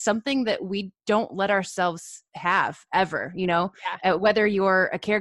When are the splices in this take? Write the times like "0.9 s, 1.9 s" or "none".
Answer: none